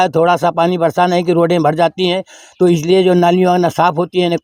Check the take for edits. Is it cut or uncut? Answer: uncut